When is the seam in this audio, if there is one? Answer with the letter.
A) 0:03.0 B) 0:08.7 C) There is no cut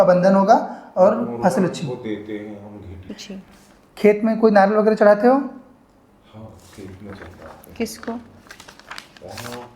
A